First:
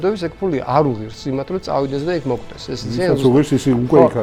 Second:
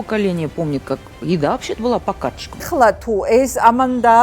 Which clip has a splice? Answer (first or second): second